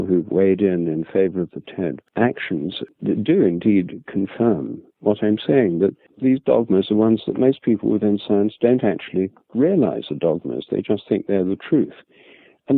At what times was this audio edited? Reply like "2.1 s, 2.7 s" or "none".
2.0 s, 2.8 s, 6.1 s